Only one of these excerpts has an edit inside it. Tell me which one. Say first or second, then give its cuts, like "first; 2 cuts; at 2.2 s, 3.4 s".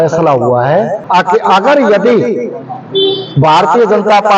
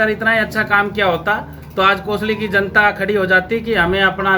first; 1 cut; at 1.0 s